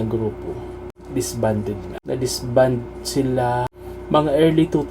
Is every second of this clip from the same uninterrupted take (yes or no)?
no